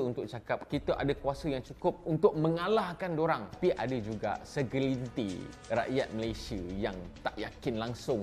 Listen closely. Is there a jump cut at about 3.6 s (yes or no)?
yes